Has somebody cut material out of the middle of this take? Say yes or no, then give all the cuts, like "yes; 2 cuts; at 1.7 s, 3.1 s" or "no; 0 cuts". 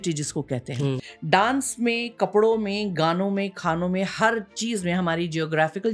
yes; 1 cut; at 1.1 s